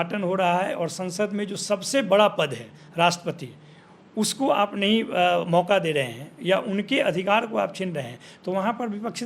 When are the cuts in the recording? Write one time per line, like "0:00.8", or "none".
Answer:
none